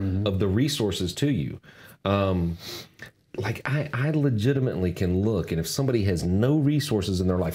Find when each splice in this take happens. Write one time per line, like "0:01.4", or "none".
none